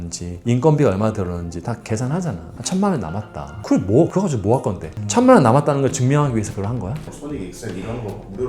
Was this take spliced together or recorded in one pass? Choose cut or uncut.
cut